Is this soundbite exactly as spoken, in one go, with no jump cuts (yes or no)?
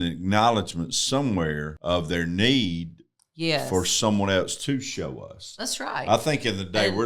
no